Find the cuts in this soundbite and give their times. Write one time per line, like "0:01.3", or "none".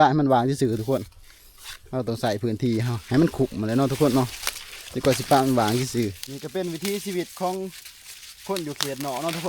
0:06.3